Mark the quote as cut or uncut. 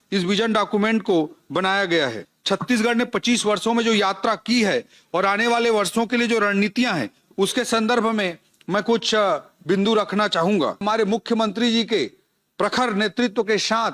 cut